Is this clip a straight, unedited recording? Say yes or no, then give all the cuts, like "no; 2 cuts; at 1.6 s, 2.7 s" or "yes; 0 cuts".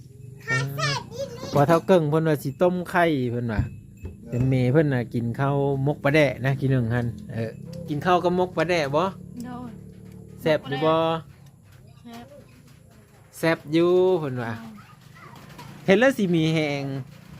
no; 1 cut; at 7.5 s